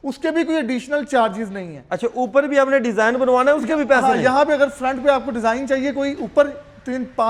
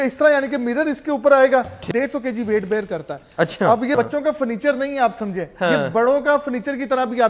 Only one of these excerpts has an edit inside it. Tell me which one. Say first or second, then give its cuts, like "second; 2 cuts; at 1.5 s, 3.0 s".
second; 2 cuts; at 1.8 s, 3.9 s